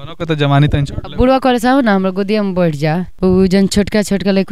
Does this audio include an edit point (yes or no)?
yes